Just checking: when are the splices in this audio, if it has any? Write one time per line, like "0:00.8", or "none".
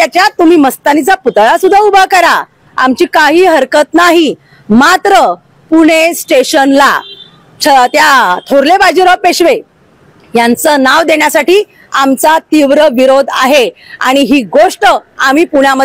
none

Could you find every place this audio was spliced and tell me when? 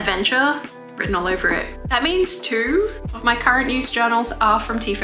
none

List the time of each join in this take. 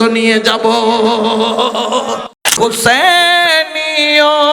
0:02.3

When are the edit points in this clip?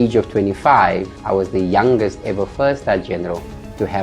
0:01.1

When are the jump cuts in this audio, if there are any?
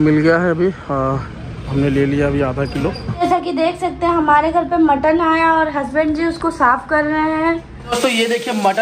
0:03.1
0:08.0

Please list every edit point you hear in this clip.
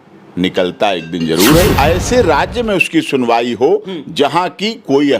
0:01.7

